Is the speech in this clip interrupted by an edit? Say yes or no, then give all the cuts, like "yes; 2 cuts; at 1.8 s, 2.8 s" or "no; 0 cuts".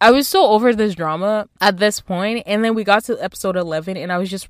yes; 1 cut; at 1.5 s